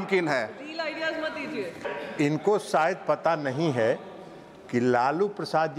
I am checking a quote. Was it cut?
yes; 1 cut; at 1.9 s

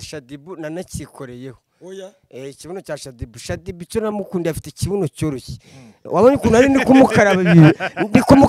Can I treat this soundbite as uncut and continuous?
yes; 0 cuts

